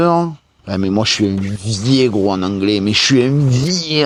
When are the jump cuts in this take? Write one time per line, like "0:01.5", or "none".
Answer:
none